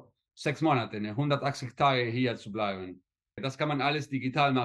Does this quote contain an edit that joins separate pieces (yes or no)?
yes